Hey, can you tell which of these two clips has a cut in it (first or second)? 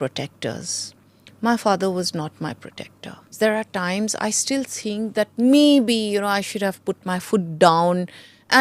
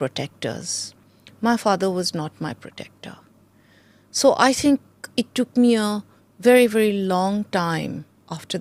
first